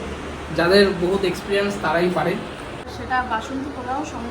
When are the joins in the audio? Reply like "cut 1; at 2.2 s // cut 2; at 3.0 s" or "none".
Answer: cut 1; at 2.9 s